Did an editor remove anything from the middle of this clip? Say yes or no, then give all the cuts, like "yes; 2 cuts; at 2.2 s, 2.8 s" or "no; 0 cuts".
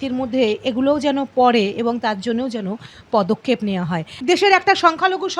yes; 1 cut; at 4.2 s